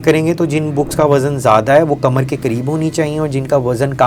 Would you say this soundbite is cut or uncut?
uncut